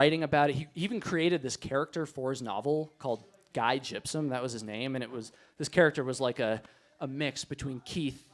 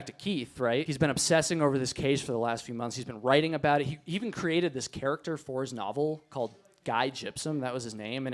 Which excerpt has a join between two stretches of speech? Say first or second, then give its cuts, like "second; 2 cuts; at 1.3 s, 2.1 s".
second; 1 cut; at 0.9 s